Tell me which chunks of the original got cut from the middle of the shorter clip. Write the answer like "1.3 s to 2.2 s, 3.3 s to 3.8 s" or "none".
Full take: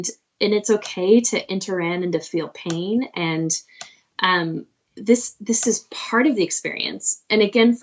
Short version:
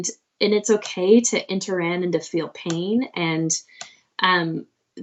none